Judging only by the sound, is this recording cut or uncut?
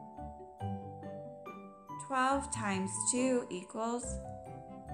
uncut